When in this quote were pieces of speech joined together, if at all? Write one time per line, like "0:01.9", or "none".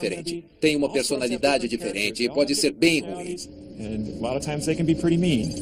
none